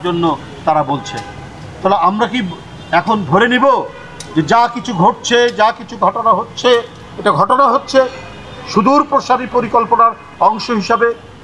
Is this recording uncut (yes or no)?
yes